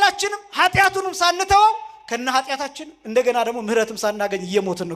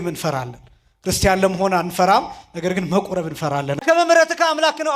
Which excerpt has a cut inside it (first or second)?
second